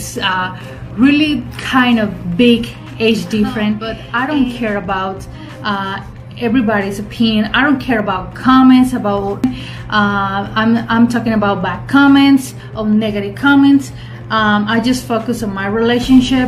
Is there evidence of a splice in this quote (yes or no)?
yes